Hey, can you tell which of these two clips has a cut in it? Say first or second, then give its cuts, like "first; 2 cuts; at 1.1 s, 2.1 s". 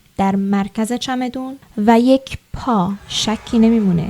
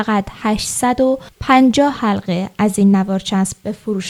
first; 1 cut; at 3.1 s